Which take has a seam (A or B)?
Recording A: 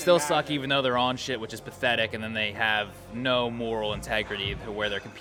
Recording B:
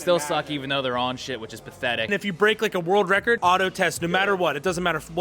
B